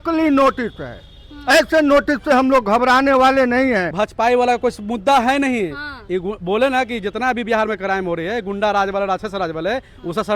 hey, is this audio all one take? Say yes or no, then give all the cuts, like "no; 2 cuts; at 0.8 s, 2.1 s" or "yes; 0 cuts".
no; 1 cut; at 4.0 s